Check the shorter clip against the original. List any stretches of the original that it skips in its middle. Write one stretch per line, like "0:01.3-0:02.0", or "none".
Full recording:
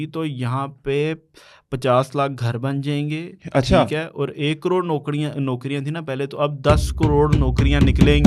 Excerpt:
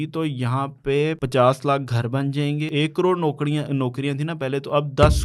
0:01.2-0:01.7
0:03.2-0:04.3